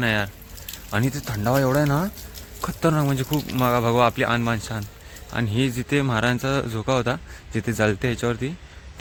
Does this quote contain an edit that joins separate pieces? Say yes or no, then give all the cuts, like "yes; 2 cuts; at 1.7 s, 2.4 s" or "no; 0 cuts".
no; 0 cuts